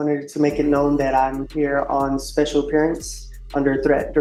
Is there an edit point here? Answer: no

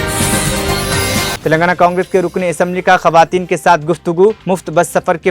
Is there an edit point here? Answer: yes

